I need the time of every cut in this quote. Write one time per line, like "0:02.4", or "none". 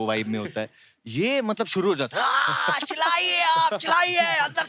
none